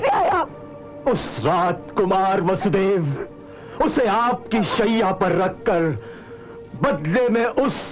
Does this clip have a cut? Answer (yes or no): no